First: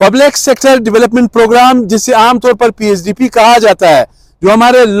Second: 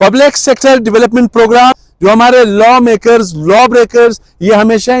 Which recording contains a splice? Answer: second; 1 cut; at 1.7 s

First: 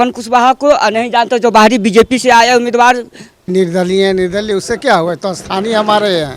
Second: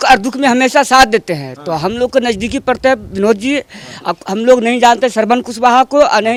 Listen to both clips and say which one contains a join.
first; 1 cut; at 3.5 s

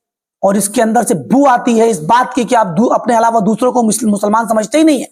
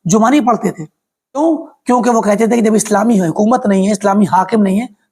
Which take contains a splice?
second; 1 cut; at 1.4 s

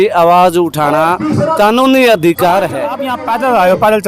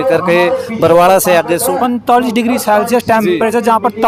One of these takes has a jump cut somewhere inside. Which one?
first; 1 cut; at 3.1 s

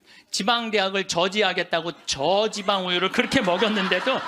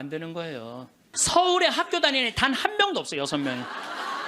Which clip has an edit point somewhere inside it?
second; 1 cut; at 1.1 s

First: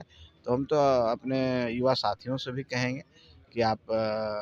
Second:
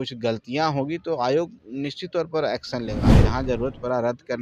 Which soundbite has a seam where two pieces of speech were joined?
second; 1 cut; at 3.2 s

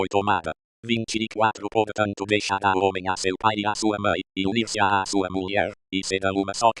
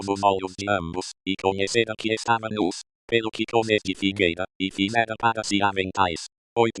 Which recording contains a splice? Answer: second; 1 cut; at 3.9 s

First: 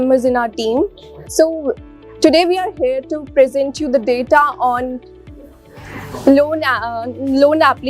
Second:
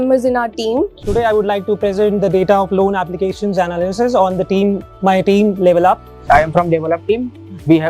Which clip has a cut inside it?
second; 2 cuts; at 1.0 s, 6.1 s

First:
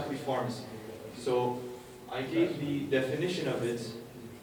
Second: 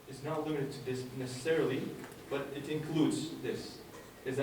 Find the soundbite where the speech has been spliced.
second; 1 cut; at 3.5 s

